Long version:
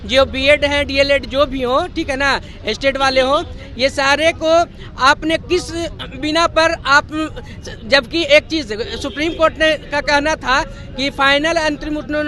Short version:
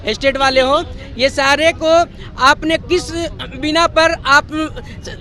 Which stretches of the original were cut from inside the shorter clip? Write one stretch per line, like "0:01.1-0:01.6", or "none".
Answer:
none